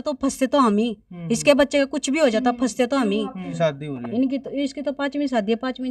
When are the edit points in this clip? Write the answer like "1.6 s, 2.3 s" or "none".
3.5 s